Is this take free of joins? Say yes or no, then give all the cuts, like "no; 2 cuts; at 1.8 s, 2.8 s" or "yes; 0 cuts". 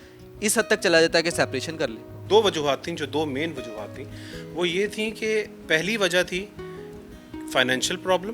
no; 1 cut; at 2.1 s